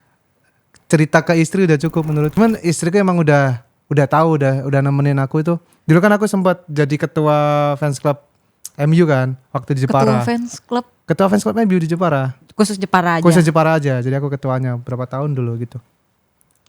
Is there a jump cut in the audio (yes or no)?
yes